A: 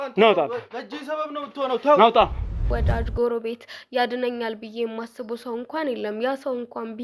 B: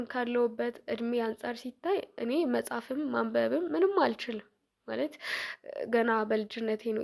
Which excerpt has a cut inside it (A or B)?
A